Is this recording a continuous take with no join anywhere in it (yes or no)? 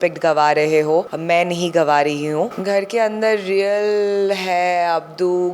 no